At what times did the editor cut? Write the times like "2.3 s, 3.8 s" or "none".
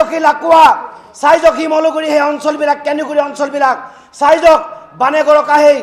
none